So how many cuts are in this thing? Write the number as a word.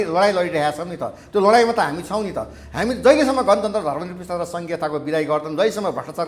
zero